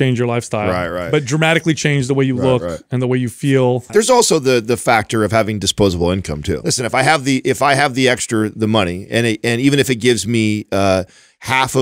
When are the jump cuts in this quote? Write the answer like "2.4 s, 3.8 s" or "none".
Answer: 3.9 s, 6.6 s

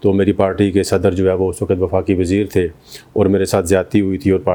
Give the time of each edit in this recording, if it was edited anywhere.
none

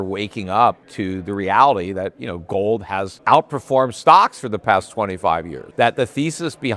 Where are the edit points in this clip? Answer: 0.9 s, 3.1 s, 5.6 s

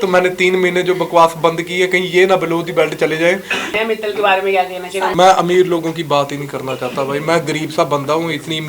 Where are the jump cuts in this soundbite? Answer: 3.8 s, 5.1 s

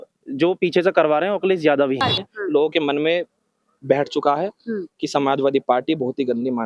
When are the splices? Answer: 2.1 s

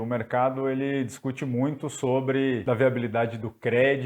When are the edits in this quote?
2.6 s

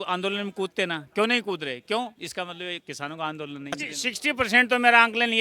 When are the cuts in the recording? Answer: 4.2 s

